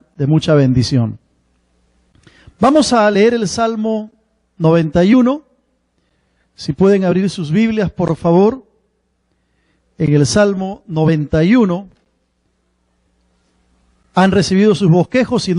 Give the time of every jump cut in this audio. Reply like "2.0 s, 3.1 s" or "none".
5.4 s